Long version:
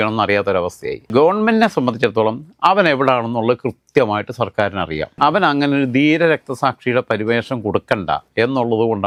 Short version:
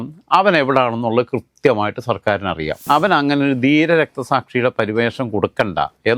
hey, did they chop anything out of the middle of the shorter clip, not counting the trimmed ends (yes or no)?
no